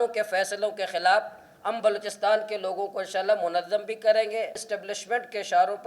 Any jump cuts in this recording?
yes; 1 cut; at 4.7 s

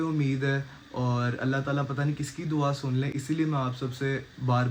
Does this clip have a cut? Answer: no; 0 cuts

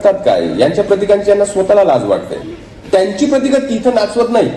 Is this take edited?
yes; 1 cut; at 2.7 s

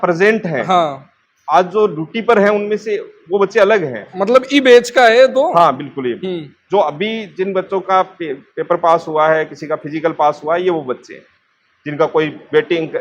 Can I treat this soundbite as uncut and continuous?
yes; 0 cuts

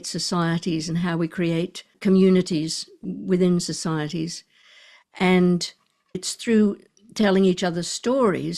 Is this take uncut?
no; 2 cuts; at 1.9 s, 6.2 s

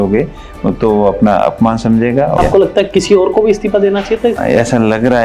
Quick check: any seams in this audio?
yes; 2 cuts; at 2.4 s, 4.4 s

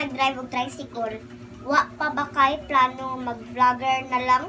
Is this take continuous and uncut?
yes; 0 cuts

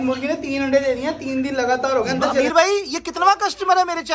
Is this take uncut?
no; 1 cut; at 2.5 s

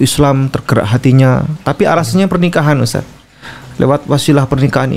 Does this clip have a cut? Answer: no; 0 cuts

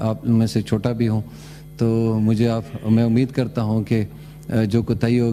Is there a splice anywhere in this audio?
no; 0 cuts

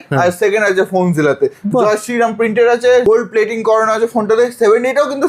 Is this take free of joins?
no; 1 cut; at 3.0 s

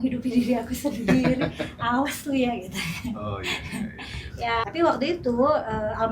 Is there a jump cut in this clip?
yes; 1 cut; at 4.6 s

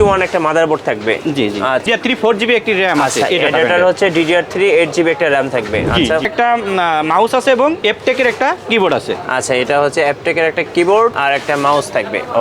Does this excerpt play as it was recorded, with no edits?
no; 4 cuts; at 1.8 s, 6.3 s, 7.8 s, 11.2 s

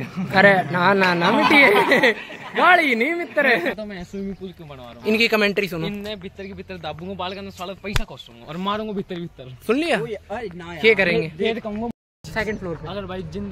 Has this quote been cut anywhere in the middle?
yes; 2 cuts; at 4.3 s, 12.2 s

